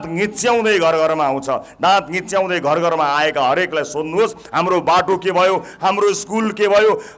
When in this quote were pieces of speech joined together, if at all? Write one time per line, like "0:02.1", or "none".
none